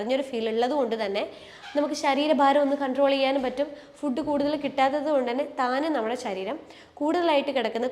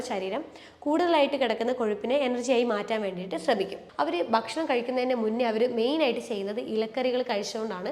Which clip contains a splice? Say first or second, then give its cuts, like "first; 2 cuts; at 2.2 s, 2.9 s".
second; 1 cut; at 3.8 s